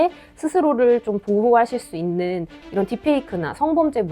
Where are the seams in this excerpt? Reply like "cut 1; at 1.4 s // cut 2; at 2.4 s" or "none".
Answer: cut 1; at 2.6 s